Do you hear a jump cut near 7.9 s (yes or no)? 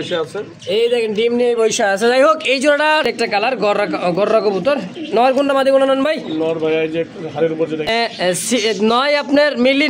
yes